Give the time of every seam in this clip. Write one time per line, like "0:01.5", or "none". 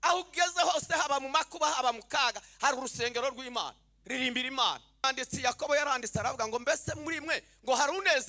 0:05.0